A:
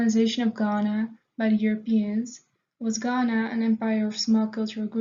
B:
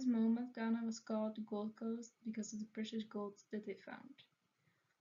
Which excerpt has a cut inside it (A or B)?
A